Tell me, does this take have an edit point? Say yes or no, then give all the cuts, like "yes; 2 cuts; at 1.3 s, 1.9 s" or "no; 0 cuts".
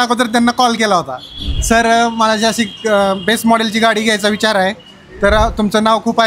no; 0 cuts